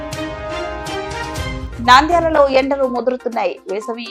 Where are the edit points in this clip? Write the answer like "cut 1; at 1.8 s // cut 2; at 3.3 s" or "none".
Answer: cut 1; at 1.5 s